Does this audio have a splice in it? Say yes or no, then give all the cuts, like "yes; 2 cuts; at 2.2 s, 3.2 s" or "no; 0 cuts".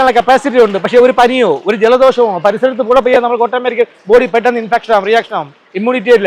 no; 0 cuts